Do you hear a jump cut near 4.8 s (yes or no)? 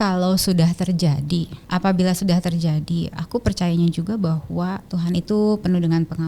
yes